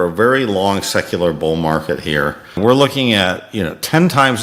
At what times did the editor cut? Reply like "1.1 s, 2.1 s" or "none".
2.6 s